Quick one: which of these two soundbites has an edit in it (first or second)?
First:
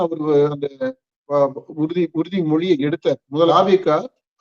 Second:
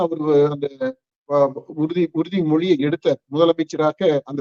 first